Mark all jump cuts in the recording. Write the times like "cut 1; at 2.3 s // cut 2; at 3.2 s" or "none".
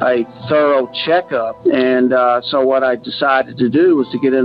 cut 1; at 1.5 s